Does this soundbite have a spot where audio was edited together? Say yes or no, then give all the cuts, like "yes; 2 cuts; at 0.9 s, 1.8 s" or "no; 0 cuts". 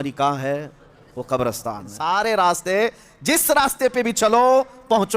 yes; 1 cut; at 1.9 s